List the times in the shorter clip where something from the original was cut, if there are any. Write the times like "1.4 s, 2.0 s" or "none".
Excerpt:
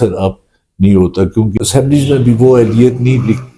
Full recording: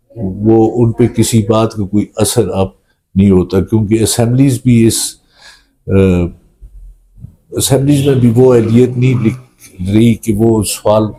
1.5 s